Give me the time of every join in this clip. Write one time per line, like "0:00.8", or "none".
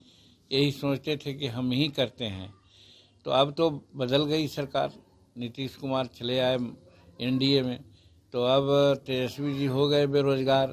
none